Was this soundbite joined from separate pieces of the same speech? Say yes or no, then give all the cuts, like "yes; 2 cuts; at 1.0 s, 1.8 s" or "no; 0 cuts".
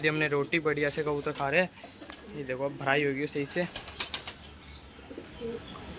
no; 0 cuts